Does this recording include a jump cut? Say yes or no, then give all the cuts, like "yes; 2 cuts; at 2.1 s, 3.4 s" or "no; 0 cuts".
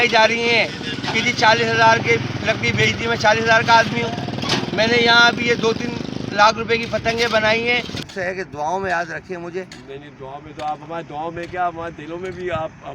yes; 1 cut; at 8.0 s